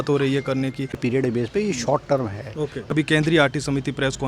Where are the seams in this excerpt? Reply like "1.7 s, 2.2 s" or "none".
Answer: 1.0 s, 2.9 s